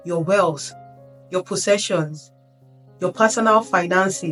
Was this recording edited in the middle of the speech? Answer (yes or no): no